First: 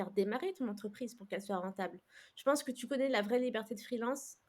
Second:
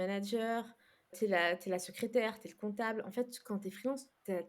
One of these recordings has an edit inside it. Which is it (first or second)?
second